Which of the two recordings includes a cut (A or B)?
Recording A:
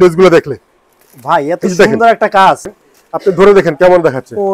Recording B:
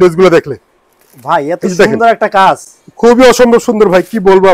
A